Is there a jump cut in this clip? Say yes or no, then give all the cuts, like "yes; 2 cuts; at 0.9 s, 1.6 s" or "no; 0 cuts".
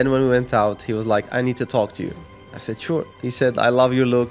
yes; 1 cut; at 3.1 s